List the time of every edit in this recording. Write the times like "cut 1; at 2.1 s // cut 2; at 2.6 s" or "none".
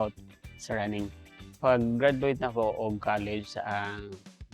cut 1; at 1.6 s

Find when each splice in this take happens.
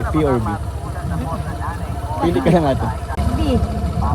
cut 1; at 3.1 s

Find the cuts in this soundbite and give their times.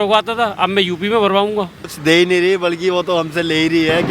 cut 1; at 1.8 s

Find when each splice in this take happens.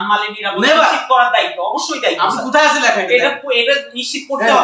none

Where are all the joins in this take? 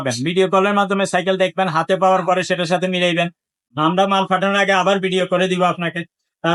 none

